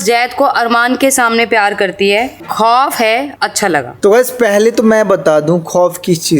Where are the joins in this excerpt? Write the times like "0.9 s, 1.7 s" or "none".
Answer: none